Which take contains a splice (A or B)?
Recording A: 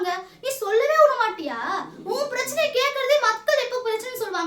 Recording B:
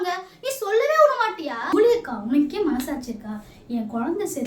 B